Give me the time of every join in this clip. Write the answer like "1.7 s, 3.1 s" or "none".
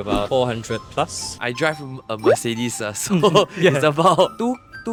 none